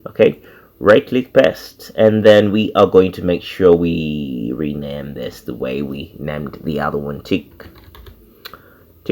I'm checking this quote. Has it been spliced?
no; 0 cuts

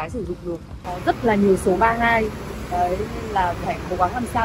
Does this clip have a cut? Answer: yes; 1 cut; at 0.9 s

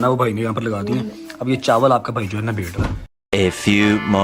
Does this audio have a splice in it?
no; 0 cuts

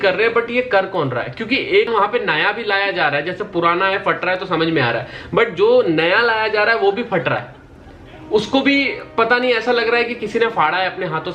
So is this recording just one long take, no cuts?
no; 1 cut; at 1.9 s

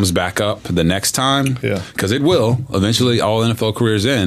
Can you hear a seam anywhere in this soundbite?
no; 0 cuts

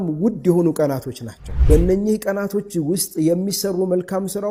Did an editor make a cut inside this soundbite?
no; 0 cuts

